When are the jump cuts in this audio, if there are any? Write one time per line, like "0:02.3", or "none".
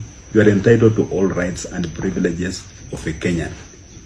none